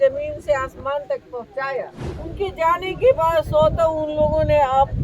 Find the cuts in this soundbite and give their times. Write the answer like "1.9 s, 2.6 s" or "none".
2.1 s